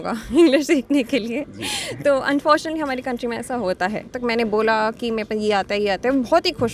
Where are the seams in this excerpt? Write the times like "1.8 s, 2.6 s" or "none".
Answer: 4.1 s